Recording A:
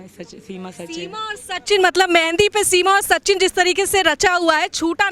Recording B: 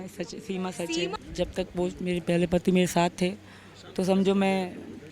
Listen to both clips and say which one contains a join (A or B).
B